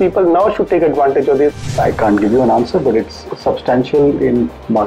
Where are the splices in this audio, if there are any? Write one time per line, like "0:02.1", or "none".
0:01.6